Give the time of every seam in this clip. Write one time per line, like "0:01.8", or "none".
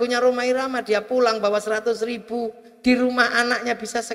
none